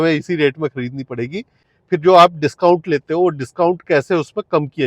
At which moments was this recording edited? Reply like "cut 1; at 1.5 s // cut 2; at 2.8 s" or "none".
cut 1; at 1.6 s

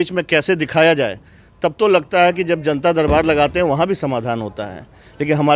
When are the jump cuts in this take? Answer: none

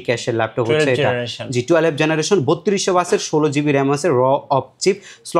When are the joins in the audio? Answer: none

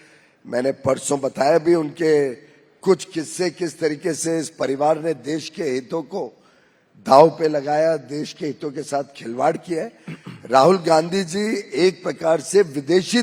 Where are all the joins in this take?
none

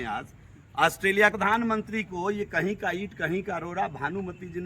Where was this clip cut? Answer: cut 1; at 1.3 s

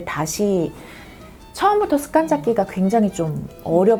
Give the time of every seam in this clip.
none

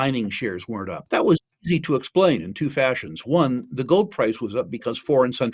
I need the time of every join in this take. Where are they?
cut 1; at 1.0 s

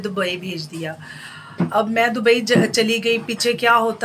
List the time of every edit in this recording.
none

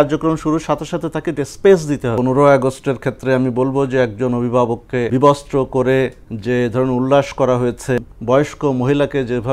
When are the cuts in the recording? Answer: cut 1; at 2.2 s // cut 2; at 5.1 s // cut 3; at 8.0 s

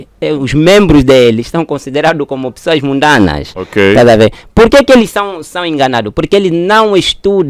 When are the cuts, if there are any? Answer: none

